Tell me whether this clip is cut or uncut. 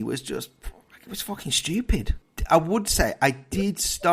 cut